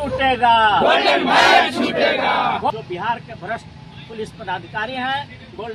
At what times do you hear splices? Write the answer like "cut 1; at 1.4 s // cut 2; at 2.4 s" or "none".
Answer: cut 1; at 2.7 s